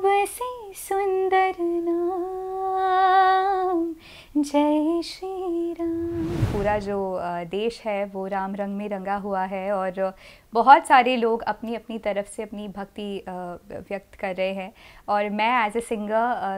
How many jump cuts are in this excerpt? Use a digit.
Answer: 1